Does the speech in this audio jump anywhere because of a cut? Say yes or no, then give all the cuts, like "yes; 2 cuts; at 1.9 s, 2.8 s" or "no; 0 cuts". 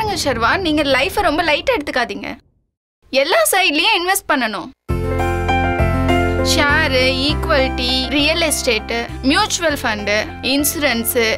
no; 0 cuts